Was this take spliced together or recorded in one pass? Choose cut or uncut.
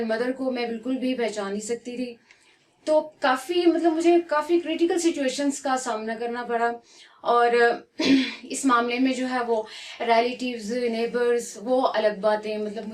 uncut